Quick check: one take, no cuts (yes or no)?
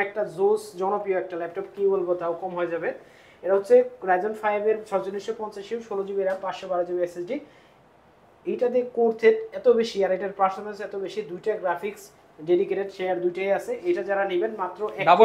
yes